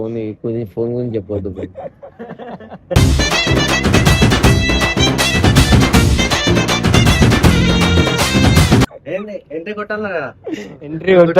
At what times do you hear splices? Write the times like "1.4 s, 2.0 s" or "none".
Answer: 9.0 s